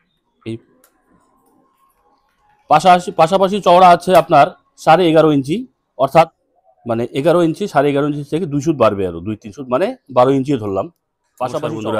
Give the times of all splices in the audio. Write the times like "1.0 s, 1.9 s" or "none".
6.4 s